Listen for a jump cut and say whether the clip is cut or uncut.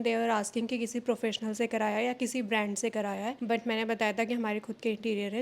uncut